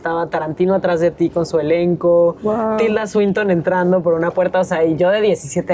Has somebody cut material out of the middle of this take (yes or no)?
no